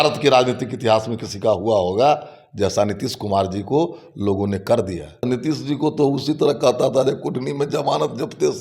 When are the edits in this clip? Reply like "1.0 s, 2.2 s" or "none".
5.2 s